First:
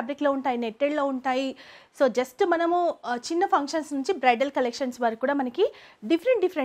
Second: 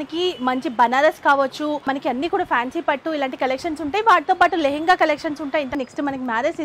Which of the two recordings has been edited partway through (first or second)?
second